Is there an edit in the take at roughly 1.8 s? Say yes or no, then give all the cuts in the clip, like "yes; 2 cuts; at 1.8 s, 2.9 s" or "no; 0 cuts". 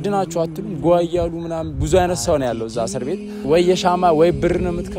no; 1 cut; at 3.3 s